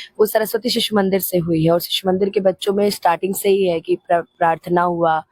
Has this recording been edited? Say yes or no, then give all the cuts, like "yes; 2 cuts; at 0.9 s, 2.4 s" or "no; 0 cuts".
no; 0 cuts